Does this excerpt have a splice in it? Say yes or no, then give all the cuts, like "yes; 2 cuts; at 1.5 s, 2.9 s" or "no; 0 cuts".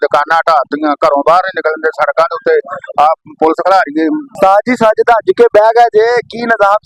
yes; 1 cut; at 4.3 s